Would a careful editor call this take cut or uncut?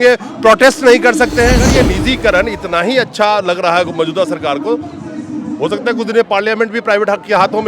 cut